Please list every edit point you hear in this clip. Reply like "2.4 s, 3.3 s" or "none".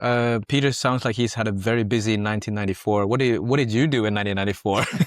none